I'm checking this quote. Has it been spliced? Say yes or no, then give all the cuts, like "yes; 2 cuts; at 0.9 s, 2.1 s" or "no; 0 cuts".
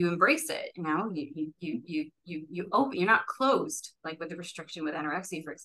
no; 0 cuts